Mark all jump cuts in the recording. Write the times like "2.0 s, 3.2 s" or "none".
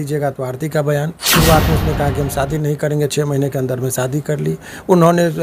1.2 s